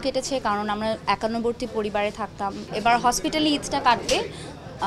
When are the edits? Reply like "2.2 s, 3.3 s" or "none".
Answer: 2.7 s